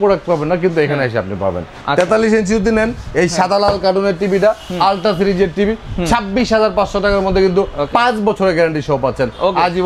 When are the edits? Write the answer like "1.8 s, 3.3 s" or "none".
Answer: none

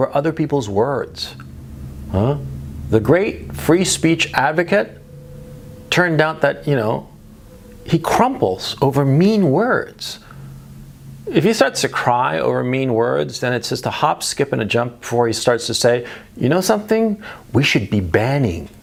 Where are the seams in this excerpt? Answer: none

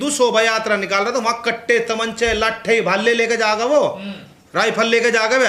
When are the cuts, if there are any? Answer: none

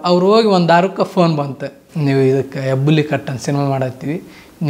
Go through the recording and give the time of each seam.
none

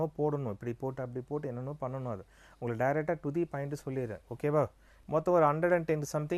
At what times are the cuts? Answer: 4.9 s

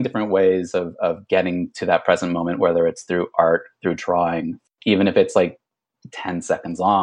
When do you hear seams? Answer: 4.6 s

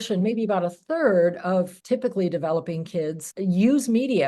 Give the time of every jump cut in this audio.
1.8 s, 3.3 s

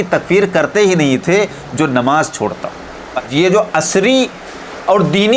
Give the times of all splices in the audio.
3.3 s

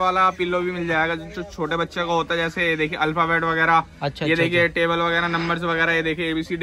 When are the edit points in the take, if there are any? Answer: none

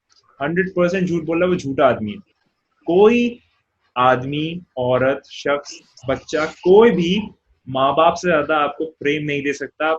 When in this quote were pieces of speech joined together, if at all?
none

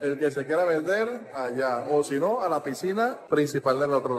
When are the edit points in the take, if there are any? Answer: 3.2 s

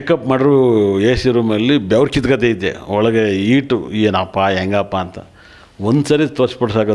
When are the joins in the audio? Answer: none

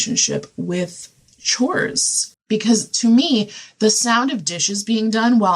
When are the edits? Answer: 2.3 s

